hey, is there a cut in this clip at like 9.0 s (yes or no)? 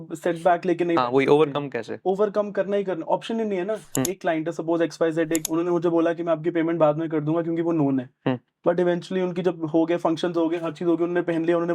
no